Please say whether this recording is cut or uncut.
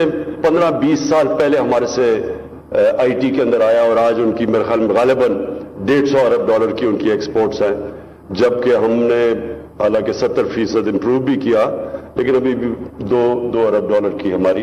uncut